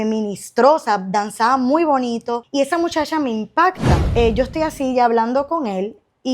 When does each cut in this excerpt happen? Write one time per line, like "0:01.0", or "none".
0:02.4
0:03.9